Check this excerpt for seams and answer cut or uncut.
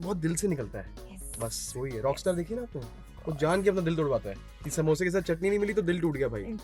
uncut